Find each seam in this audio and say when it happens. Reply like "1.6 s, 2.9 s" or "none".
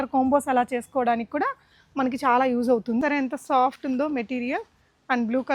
3.0 s